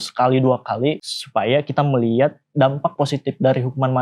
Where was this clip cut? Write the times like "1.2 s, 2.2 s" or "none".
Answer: 1.1 s